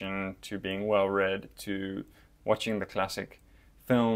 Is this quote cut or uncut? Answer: uncut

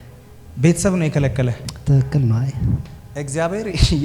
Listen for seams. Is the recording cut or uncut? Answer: cut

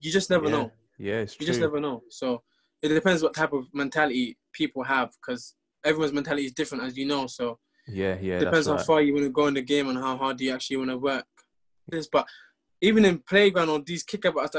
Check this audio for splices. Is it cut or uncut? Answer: cut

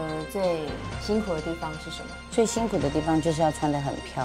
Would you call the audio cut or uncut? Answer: uncut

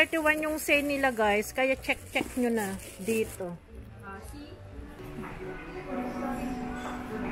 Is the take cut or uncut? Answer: cut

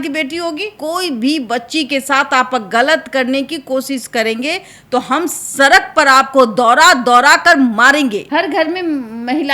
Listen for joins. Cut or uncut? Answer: cut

